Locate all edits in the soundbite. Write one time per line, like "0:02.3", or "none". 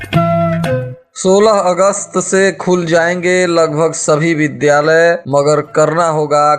0:01.0